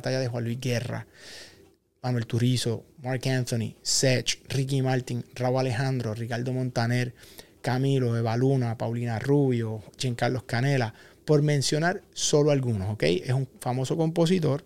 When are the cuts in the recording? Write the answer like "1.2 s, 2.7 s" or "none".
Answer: none